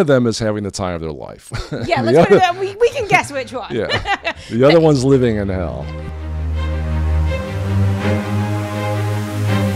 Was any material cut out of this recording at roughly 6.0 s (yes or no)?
yes